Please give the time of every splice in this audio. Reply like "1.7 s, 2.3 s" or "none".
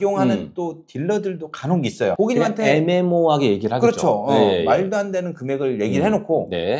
2.1 s